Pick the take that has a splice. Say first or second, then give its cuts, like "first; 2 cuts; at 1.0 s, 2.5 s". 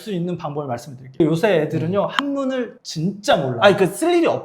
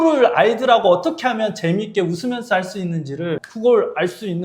first; 1 cut; at 1.2 s